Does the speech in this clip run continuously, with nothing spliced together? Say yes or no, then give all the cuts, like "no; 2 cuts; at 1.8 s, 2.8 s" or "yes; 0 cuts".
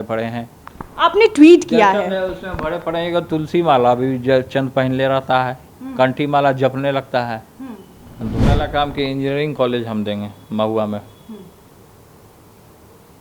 no; 1 cut; at 8.4 s